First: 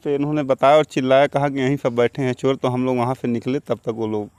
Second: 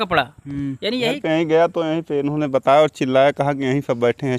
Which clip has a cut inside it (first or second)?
second